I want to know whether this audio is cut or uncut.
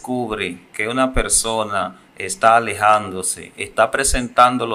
uncut